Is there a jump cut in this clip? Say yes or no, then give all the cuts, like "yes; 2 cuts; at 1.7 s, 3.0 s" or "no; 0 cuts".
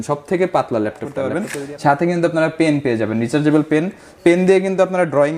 yes; 1 cut; at 1.3 s